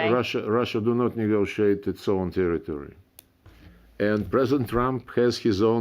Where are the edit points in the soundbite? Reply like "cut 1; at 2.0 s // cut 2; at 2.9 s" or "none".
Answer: cut 1; at 3.2 s